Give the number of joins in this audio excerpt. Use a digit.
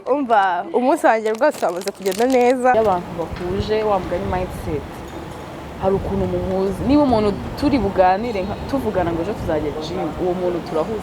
1